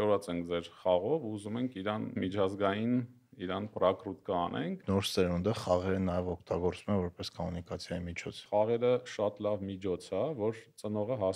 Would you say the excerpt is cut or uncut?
cut